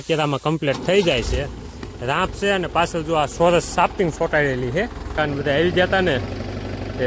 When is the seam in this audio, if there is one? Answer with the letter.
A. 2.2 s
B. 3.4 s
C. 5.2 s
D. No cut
C